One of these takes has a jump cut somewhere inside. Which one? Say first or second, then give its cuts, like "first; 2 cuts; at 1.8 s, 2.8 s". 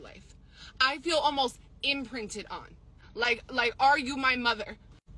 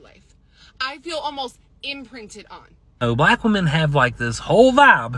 second; 1 cut; at 3.0 s